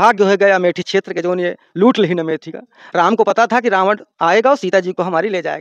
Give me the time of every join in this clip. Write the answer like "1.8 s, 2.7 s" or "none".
none